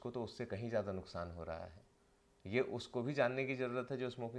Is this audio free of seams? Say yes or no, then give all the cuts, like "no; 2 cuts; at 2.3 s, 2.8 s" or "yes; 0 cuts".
yes; 0 cuts